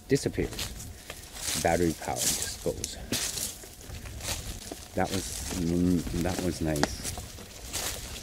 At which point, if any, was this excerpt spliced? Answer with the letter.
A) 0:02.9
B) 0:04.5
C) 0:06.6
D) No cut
B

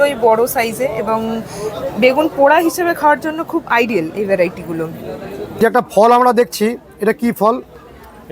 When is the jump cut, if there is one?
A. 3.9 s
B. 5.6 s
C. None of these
B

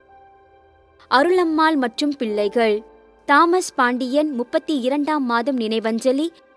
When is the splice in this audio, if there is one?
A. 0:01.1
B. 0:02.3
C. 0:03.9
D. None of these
A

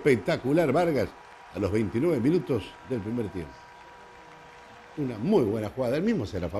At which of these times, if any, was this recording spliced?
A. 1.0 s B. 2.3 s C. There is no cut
C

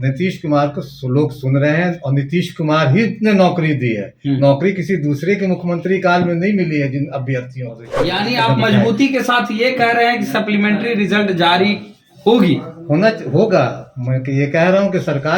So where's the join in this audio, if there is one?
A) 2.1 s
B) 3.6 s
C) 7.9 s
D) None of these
C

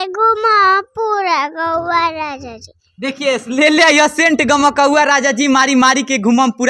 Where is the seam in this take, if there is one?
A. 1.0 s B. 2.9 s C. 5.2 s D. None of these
D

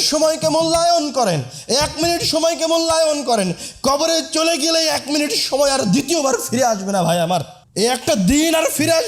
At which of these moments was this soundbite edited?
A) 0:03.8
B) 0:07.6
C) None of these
B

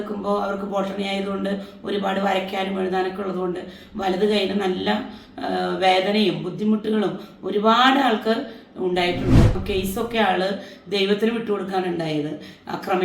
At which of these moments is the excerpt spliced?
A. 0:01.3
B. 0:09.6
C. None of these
B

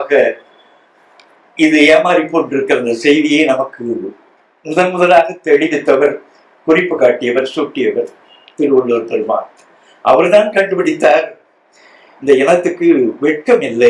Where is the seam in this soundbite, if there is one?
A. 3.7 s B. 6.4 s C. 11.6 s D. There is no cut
D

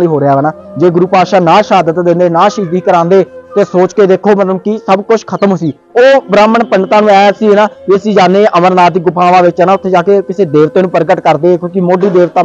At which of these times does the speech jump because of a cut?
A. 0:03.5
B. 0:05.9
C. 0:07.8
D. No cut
B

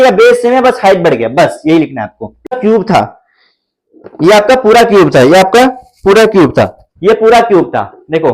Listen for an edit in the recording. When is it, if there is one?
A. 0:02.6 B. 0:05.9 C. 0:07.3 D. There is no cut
A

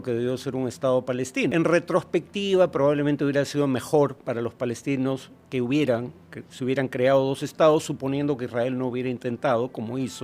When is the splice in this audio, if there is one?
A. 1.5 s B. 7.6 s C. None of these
A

